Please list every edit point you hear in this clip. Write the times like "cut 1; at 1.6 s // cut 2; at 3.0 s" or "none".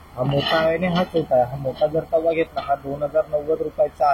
none